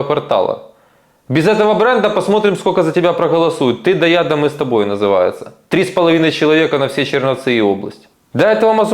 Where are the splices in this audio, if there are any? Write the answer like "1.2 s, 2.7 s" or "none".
8.0 s